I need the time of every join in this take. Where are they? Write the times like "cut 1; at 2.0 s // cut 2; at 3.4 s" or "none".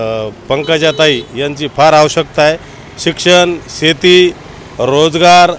none